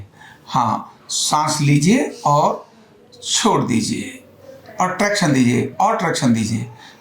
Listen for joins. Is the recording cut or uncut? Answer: uncut